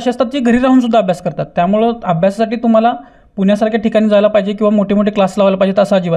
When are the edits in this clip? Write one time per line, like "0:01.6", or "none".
none